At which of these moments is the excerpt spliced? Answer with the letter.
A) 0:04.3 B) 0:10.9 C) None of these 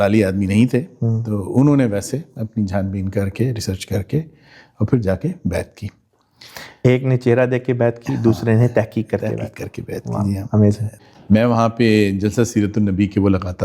B